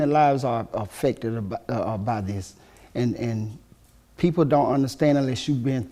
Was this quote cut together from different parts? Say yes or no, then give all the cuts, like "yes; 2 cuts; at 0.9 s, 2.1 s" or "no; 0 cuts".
no; 0 cuts